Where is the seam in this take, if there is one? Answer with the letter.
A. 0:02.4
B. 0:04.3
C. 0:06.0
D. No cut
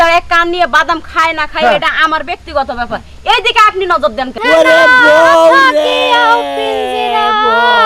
B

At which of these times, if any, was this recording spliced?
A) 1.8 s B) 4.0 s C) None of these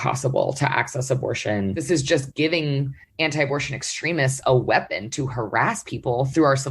A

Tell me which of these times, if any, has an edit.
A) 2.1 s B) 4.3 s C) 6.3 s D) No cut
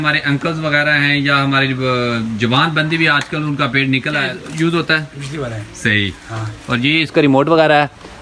B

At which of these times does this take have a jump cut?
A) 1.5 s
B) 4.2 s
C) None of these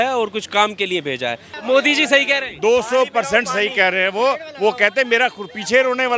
A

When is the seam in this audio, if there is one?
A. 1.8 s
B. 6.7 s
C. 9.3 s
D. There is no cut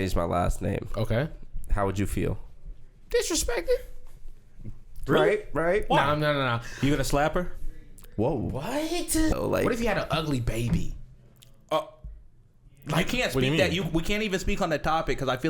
C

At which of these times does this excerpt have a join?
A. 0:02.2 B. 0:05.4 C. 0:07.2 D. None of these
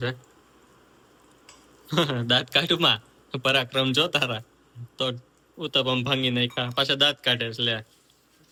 D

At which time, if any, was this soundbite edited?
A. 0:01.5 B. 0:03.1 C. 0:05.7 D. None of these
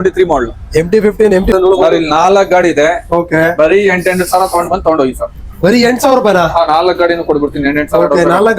A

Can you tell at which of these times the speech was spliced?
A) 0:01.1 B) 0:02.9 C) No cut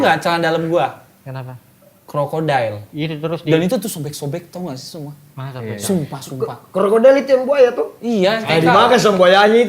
B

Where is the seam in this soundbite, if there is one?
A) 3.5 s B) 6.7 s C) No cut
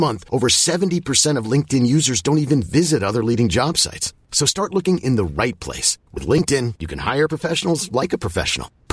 C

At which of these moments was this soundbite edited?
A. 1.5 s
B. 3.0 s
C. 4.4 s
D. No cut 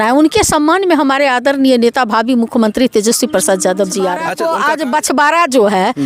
C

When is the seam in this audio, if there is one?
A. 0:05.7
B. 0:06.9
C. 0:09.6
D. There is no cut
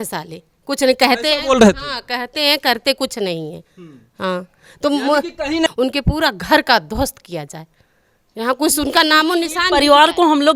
A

